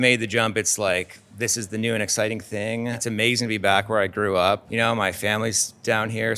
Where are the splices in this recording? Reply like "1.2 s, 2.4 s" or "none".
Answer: 3.0 s, 4.7 s